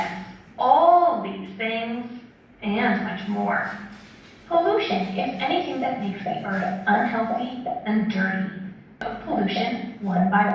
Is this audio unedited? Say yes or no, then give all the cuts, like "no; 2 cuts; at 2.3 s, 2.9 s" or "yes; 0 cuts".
no; 1 cut; at 9.0 s